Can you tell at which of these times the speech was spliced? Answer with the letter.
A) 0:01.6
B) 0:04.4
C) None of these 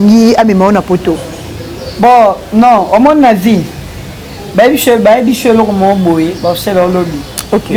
C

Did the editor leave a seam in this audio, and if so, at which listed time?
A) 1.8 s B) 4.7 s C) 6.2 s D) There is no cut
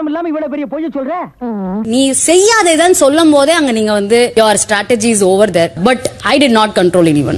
A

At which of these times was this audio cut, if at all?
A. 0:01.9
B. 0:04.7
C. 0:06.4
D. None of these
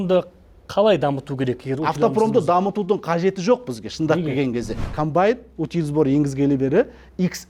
B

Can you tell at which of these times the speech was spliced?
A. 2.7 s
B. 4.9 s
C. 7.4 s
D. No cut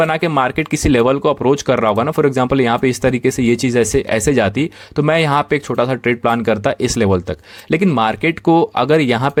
D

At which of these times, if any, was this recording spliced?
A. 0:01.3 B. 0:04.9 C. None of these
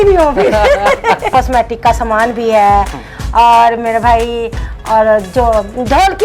A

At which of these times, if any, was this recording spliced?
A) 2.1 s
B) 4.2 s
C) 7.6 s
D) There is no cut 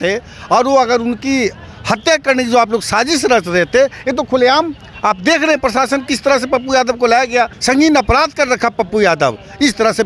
C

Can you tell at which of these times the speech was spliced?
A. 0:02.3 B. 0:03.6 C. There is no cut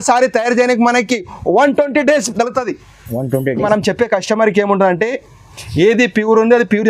B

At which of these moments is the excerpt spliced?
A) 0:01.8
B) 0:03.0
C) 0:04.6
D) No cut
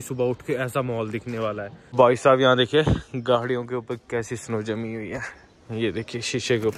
A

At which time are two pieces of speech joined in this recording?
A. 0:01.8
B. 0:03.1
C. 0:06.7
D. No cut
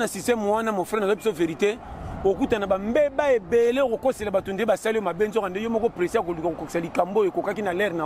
D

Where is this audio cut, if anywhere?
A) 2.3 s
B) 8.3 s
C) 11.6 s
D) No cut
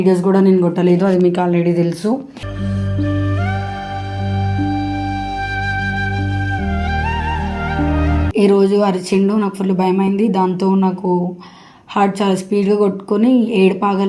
B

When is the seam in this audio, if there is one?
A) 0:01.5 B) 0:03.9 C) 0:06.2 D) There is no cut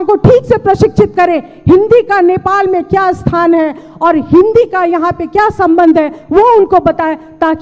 D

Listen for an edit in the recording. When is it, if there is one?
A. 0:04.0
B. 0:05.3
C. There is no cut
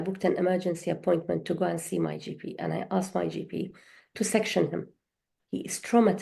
B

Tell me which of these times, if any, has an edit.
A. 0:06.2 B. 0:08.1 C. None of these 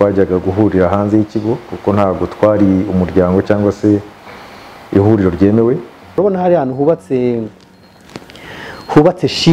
A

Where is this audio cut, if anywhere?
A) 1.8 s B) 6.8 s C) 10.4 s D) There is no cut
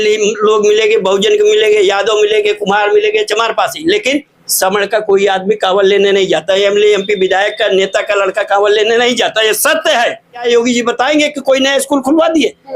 C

